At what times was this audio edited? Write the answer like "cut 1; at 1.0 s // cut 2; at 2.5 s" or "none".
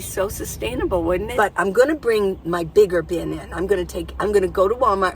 cut 1; at 1.3 s